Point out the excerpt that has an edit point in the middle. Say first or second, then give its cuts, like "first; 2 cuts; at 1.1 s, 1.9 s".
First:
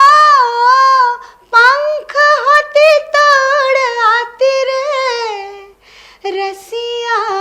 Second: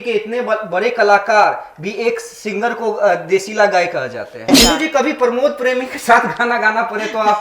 second; 1 cut; at 4.5 s